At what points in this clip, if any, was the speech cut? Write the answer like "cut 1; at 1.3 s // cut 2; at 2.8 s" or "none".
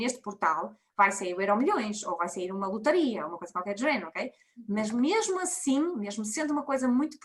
none